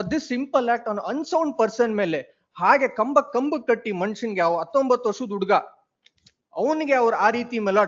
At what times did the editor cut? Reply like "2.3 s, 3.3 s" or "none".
none